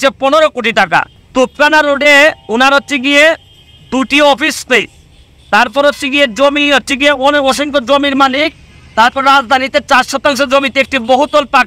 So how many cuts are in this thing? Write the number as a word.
zero